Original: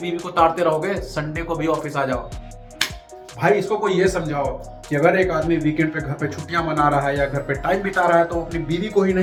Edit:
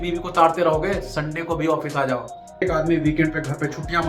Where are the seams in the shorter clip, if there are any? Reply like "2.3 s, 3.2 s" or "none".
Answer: 2.6 s